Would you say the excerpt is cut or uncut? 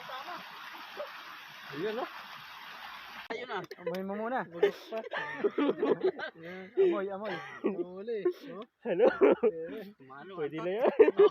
cut